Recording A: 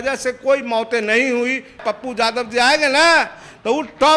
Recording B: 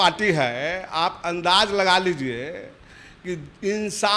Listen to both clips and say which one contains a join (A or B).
A